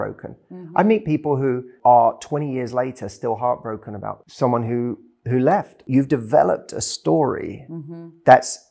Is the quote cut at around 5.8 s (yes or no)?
yes